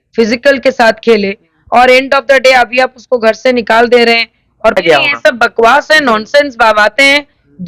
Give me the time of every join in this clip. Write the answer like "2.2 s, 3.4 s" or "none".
4.8 s